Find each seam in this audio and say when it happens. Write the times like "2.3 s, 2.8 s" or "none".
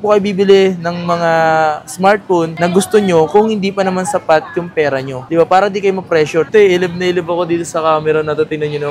6.5 s